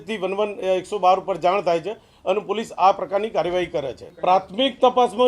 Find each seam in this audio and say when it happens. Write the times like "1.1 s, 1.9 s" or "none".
4.0 s